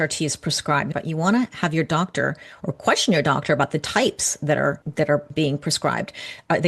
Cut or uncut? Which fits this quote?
cut